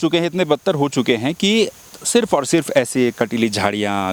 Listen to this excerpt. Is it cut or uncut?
uncut